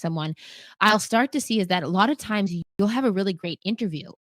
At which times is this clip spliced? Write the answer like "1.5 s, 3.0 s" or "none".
2.6 s